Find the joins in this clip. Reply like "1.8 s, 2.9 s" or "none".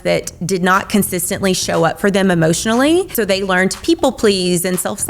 3.1 s